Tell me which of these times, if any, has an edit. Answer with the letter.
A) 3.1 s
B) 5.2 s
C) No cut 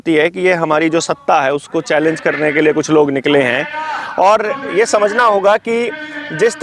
C